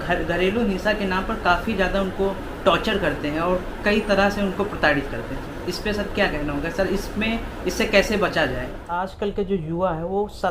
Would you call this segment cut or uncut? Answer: cut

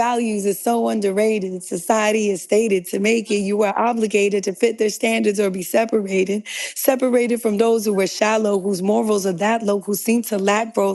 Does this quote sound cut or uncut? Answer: uncut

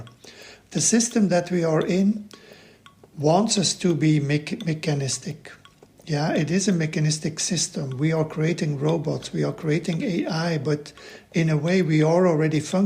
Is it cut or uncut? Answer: uncut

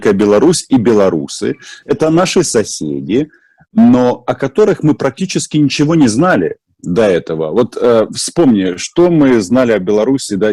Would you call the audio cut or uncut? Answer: uncut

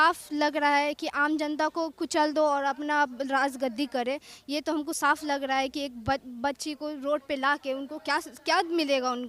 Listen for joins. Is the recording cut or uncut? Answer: uncut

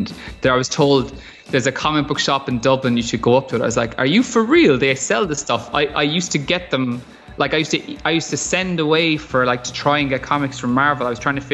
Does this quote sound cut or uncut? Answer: uncut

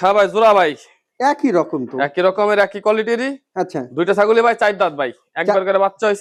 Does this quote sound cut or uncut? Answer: uncut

